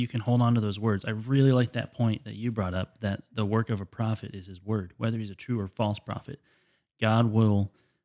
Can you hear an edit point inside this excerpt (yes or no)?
no